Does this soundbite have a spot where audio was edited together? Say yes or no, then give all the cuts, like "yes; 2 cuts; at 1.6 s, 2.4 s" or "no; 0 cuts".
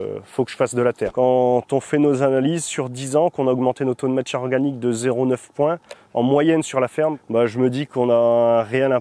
yes; 2 cuts; at 1.0 s, 7.2 s